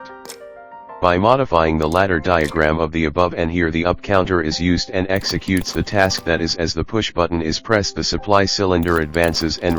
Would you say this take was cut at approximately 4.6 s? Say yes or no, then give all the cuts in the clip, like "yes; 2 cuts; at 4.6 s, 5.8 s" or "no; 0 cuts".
no; 1 cut; at 1.0 s